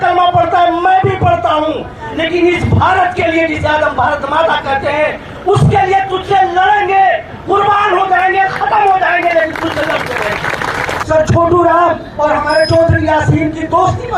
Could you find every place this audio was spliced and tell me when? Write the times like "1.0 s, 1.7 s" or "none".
10.9 s